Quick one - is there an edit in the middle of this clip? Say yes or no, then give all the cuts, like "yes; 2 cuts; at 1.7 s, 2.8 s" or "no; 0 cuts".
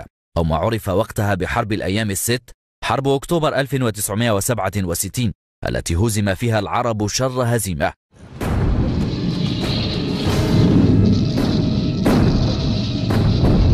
no; 0 cuts